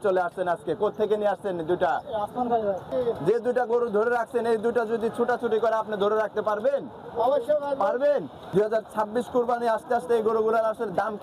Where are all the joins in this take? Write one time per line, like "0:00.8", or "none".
0:02.9
0:08.4